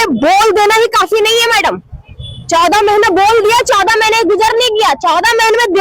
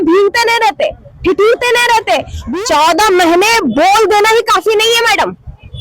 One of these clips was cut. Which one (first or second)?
second